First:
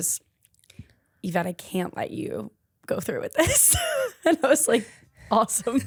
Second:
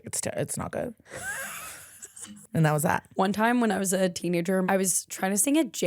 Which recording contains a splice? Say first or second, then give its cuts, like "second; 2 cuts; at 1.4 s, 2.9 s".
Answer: second; 4 cuts; at 1.0 s, 2.4 s, 3.1 s, 4.6 s